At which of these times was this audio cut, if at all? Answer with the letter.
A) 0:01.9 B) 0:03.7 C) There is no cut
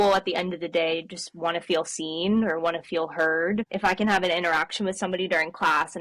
B